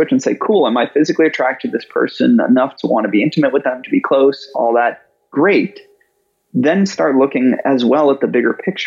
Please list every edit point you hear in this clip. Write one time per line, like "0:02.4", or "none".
none